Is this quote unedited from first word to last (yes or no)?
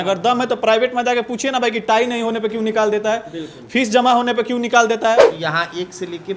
no